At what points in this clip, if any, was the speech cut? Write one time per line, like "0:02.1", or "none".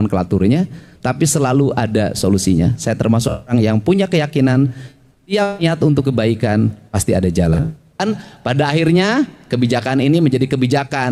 0:08.0